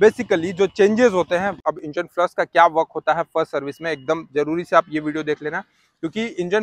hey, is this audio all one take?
no; 1 cut; at 1.6 s

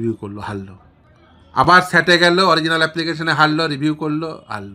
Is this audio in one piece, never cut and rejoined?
yes; 0 cuts

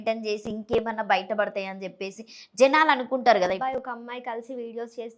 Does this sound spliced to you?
yes; 1 cut; at 3.6 s

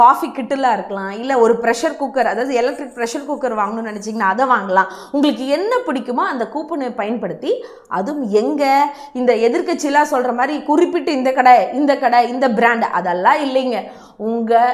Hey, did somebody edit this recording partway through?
no; 0 cuts

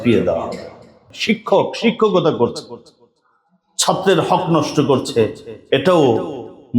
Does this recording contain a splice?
yes; 1 cut; at 1.1 s

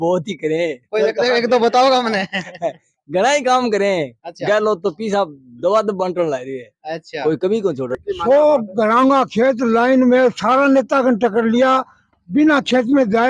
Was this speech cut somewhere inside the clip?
yes; 1 cut; at 7.9 s

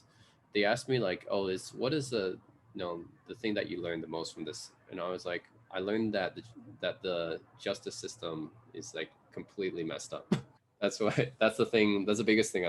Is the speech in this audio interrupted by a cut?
yes; 1 cut; at 10.5 s

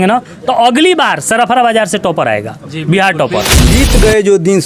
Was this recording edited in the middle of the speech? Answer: yes; 1 cut; at 3.7 s

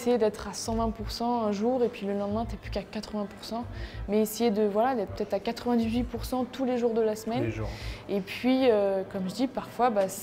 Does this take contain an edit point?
no; 0 cuts

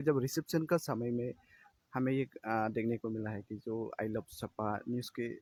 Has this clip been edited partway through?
no; 0 cuts

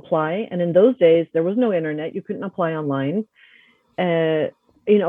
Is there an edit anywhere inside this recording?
no; 0 cuts

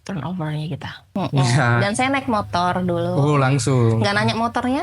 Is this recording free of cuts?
no; 1 cut; at 1.0 s

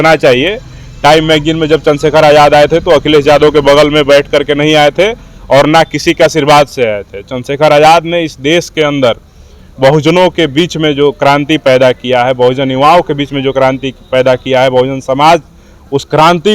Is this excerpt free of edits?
yes; 0 cuts

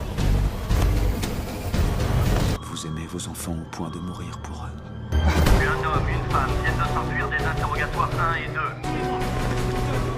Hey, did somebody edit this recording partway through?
yes; 1 cut; at 2.5 s

